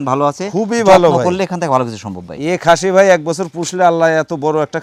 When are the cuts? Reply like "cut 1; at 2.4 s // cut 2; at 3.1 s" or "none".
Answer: none